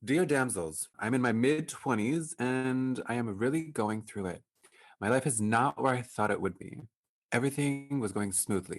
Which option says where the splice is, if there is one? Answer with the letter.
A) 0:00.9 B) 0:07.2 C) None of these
A